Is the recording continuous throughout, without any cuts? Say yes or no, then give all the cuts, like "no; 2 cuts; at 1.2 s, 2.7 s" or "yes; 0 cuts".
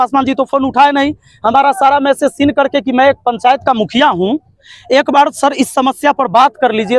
yes; 0 cuts